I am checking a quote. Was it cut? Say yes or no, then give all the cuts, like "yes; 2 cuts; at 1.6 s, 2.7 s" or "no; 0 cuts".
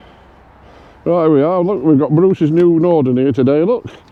no; 0 cuts